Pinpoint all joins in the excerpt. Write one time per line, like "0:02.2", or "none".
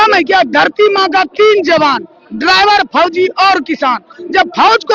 none